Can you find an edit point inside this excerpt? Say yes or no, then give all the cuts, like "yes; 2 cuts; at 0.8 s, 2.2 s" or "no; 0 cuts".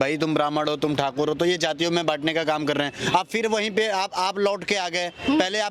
no; 0 cuts